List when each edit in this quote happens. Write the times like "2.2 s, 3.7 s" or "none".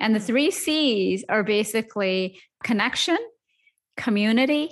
2.6 s